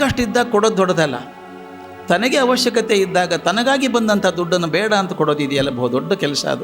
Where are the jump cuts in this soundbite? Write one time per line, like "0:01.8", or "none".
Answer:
none